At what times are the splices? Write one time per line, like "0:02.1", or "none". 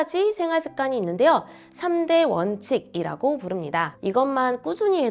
0:03.9